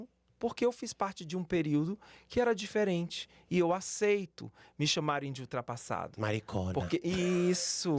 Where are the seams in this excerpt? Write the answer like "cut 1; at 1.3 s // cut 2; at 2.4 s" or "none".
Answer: none